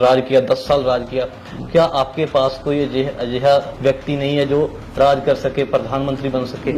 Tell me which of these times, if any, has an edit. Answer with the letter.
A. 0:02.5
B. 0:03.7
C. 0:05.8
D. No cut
B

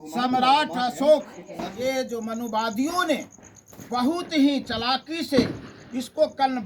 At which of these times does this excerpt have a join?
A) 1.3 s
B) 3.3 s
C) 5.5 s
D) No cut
A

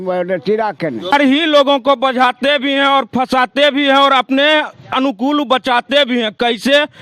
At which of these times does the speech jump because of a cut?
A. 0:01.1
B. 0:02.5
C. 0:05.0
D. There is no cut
A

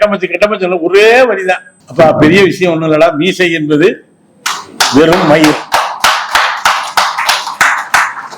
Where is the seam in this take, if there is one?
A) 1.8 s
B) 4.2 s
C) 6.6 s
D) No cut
A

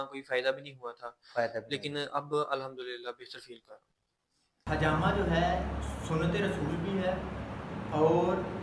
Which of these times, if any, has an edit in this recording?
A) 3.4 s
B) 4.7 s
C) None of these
B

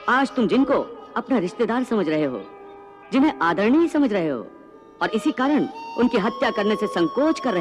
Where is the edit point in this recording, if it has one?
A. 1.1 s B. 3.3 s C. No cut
C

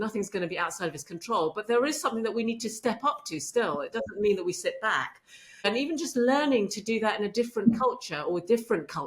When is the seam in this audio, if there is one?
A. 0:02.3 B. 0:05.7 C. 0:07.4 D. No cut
B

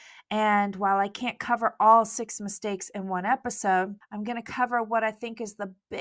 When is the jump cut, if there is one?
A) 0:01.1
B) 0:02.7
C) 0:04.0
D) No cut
C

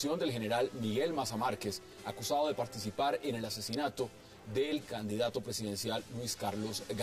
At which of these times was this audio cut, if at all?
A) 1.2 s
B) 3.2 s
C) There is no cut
C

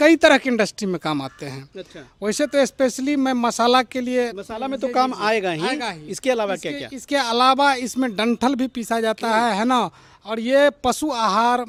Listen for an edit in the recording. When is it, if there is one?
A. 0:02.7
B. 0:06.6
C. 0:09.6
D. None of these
D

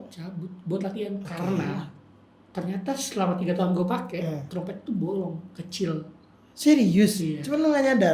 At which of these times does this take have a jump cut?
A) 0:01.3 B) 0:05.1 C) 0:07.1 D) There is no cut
A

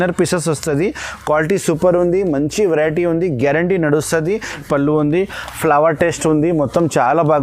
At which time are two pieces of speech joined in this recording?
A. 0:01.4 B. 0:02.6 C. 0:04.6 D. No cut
C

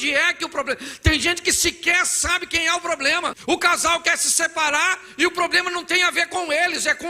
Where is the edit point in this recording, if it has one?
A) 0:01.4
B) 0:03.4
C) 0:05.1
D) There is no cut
B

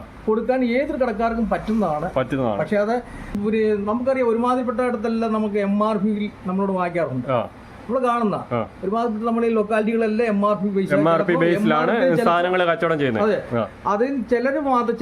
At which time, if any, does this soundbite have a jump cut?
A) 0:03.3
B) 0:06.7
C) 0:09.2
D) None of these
A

